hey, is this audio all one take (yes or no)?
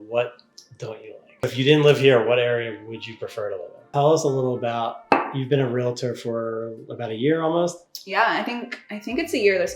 no